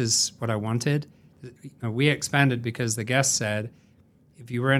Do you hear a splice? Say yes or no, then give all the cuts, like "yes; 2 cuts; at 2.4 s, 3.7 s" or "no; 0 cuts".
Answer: no; 0 cuts